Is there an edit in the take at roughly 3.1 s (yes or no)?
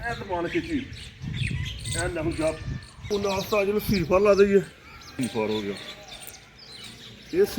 yes